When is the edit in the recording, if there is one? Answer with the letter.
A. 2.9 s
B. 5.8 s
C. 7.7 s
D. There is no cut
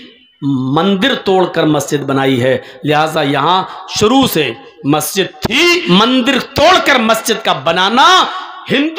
B